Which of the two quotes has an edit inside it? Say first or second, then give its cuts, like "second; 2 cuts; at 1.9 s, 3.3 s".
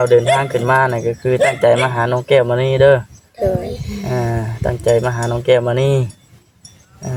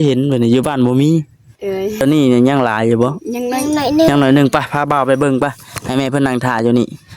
second; 1 cut; at 2.0 s